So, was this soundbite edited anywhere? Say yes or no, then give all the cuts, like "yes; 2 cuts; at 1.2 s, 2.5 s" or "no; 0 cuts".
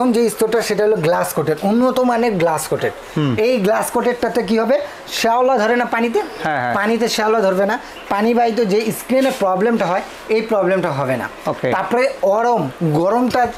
no; 0 cuts